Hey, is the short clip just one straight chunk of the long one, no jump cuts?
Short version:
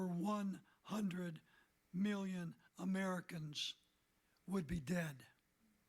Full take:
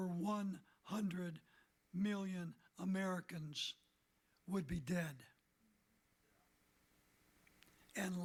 yes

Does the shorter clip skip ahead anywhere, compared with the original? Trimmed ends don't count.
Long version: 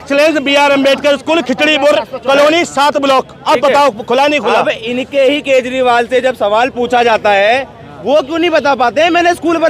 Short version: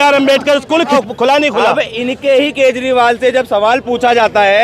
yes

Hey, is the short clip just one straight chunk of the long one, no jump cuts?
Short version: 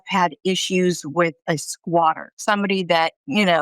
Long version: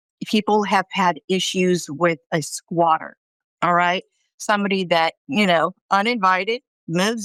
no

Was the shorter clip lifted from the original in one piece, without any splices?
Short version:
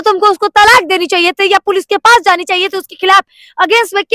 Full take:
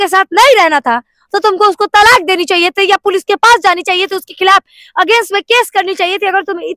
yes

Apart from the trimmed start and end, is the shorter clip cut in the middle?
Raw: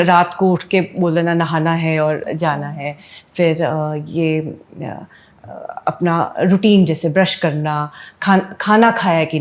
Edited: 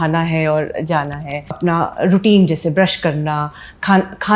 yes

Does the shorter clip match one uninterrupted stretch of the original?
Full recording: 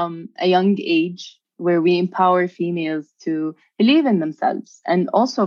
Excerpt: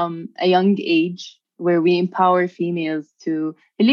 yes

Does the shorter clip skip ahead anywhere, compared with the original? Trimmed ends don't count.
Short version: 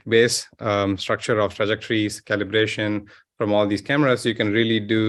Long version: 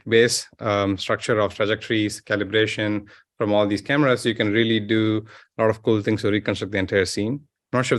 no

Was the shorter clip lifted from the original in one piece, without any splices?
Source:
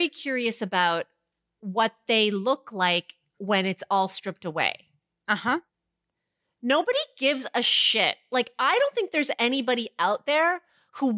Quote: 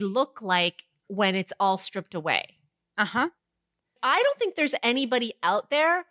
no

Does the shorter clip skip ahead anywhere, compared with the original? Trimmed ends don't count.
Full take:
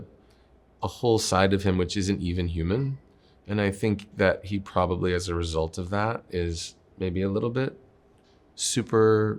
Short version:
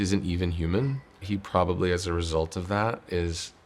yes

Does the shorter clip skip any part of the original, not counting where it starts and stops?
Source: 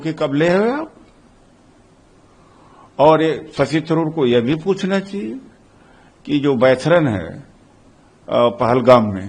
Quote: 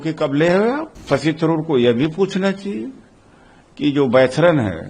yes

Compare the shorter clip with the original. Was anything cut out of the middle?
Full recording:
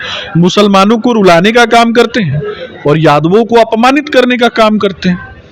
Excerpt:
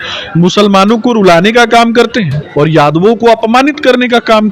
yes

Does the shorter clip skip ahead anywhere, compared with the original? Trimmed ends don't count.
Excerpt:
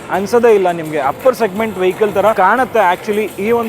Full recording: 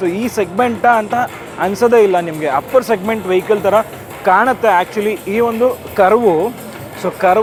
yes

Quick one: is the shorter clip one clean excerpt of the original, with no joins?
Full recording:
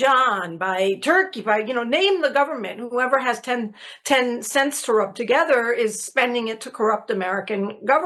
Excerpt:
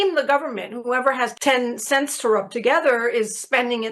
no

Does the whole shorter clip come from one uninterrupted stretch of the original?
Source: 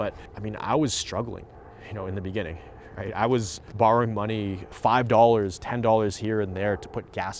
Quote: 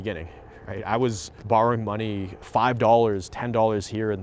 yes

